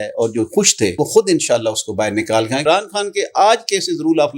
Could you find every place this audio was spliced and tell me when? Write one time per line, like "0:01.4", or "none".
0:01.0
0:02.6